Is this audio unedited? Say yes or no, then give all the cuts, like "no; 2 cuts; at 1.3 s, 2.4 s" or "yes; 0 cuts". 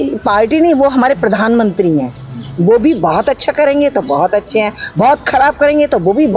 yes; 0 cuts